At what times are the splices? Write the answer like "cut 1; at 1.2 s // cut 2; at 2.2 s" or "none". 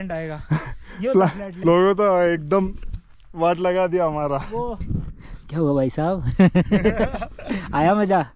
cut 1; at 1.5 s // cut 2; at 4.8 s

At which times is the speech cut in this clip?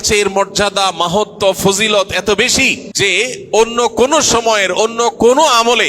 cut 1; at 2.8 s

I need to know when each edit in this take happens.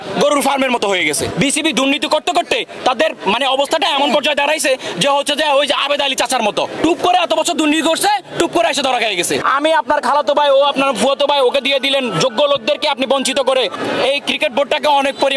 cut 1; at 1.2 s // cut 2; at 6.7 s // cut 3; at 9.4 s // cut 4; at 13.7 s

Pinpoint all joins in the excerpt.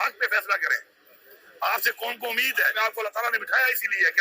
cut 1; at 2.7 s

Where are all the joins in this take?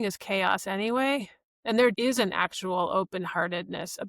cut 1; at 1.9 s

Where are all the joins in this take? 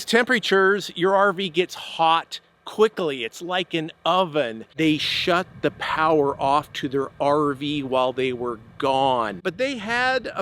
cut 1; at 4.6 s // cut 2; at 9.4 s

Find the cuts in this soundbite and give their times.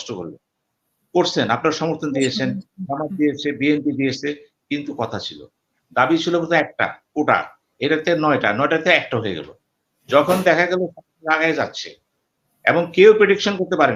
none

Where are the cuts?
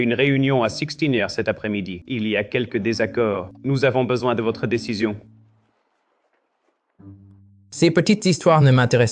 cut 1; at 2.0 s

